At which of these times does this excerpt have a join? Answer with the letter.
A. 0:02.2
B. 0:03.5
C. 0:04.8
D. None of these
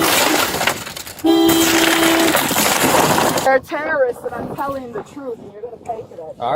B